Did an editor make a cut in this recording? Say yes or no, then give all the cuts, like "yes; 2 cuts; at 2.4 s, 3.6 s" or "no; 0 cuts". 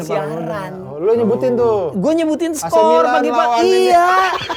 no; 0 cuts